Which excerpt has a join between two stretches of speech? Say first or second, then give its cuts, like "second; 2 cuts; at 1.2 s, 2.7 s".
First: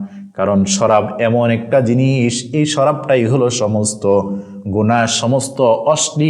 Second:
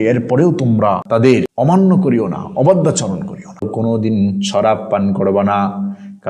second; 2 cuts; at 1.1 s, 3.7 s